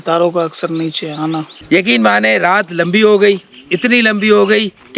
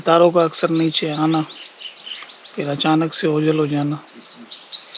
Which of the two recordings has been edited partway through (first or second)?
first